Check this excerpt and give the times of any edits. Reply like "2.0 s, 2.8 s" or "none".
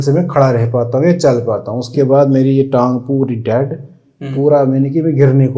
none